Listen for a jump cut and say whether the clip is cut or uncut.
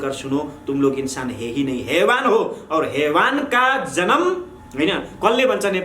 cut